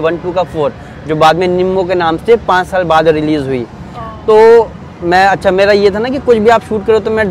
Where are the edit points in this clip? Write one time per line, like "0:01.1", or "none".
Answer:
none